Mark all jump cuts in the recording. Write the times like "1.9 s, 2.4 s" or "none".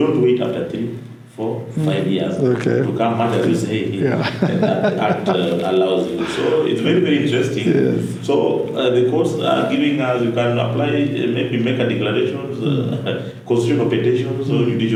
none